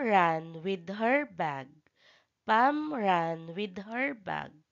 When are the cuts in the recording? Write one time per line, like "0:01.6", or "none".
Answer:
0:03.5